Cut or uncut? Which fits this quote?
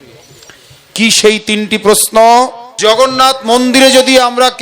cut